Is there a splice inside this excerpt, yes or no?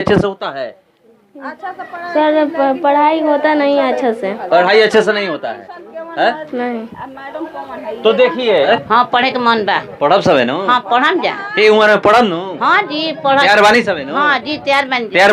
yes